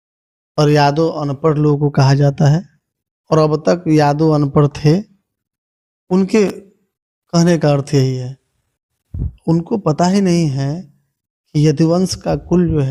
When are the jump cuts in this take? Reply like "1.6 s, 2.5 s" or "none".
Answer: none